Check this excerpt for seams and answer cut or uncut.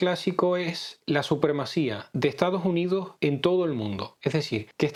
uncut